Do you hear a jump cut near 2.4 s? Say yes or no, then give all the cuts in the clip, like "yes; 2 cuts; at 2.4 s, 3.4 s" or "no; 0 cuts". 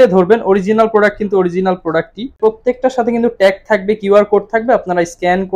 yes; 1 cut; at 2.4 s